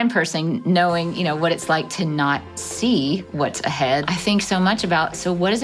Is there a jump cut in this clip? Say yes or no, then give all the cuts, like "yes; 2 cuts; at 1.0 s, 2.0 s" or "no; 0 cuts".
yes; 1 cut; at 4.1 s